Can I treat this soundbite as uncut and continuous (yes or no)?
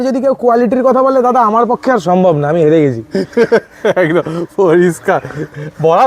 yes